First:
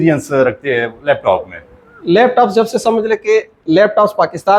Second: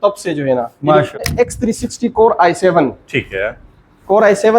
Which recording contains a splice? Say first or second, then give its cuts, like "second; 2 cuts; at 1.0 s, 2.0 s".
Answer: second; 1 cut; at 1.2 s